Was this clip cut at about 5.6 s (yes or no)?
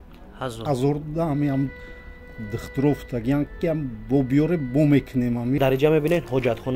yes